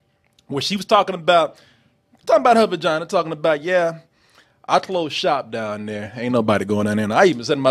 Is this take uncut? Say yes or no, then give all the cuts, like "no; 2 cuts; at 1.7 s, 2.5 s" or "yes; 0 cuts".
yes; 0 cuts